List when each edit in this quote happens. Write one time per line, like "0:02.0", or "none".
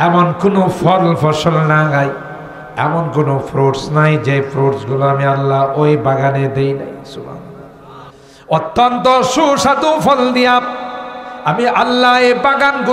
0:08.2